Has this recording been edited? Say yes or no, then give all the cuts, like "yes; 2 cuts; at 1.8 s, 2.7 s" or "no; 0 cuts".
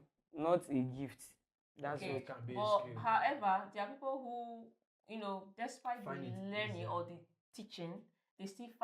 no; 0 cuts